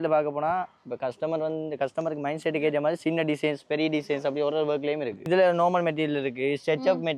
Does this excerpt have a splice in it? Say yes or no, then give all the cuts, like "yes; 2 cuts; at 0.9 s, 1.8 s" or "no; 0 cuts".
yes; 1 cut; at 5.2 s